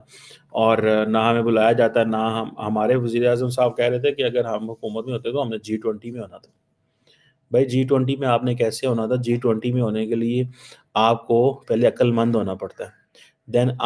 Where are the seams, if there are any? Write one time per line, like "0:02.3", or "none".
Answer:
none